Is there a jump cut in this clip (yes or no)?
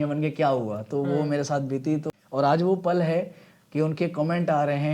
yes